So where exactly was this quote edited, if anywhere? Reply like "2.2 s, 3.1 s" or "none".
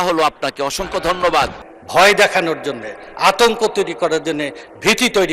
1.6 s